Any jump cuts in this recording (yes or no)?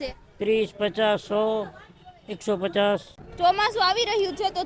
yes